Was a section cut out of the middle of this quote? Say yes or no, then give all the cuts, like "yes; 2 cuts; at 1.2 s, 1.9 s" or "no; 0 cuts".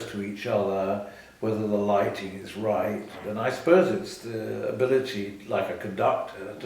yes; 1 cut; at 3.2 s